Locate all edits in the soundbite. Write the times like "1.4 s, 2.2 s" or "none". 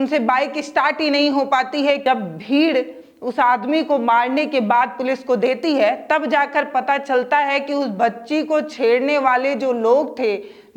2.0 s